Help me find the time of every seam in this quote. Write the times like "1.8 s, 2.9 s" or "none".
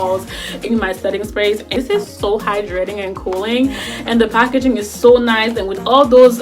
1.7 s